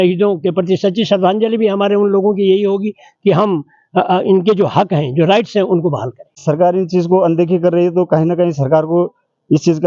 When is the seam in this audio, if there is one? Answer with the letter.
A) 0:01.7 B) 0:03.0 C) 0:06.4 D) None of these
C